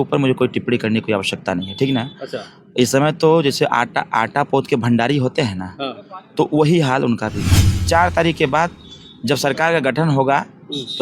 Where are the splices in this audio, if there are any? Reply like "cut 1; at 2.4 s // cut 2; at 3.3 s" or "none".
cut 1; at 7.5 s